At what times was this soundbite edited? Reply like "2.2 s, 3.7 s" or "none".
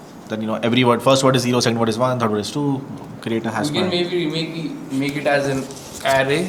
none